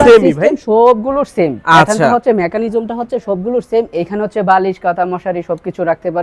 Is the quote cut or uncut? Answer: uncut